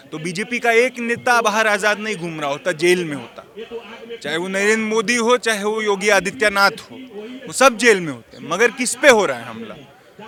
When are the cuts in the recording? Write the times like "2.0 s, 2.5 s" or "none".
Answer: none